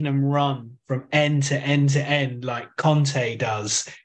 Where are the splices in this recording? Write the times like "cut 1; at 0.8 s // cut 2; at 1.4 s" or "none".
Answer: none